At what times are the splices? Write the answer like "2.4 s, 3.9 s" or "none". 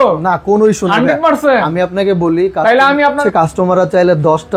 3.2 s

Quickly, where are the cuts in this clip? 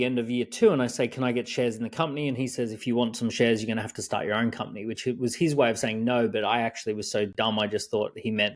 none

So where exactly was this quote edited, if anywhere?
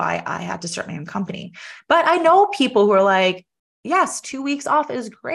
none

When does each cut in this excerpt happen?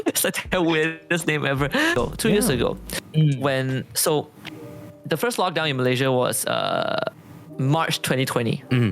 1.9 s

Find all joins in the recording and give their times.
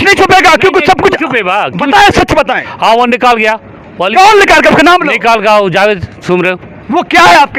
none

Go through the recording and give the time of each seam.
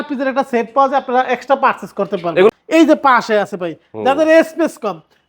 2.5 s

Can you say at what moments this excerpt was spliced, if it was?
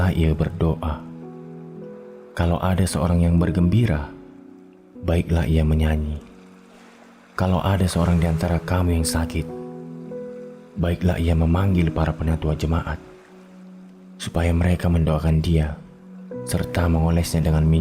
0.9 s, 2.3 s

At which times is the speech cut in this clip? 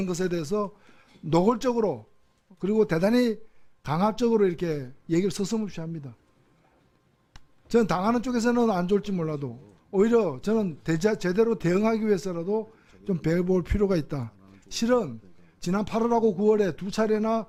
none

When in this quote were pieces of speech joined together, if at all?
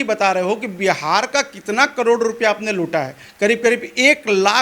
3.2 s

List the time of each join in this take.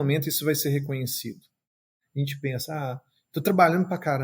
2.0 s

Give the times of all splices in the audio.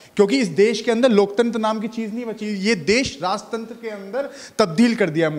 none

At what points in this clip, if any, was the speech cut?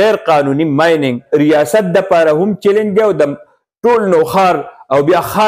1.2 s

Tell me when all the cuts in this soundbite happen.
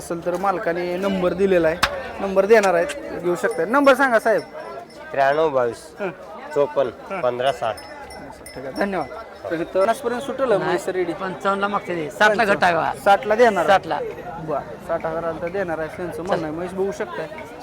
9.9 s

